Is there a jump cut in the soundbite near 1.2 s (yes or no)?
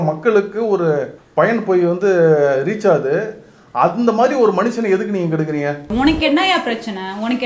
yes